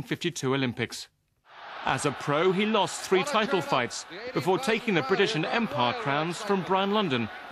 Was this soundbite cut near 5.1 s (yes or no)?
no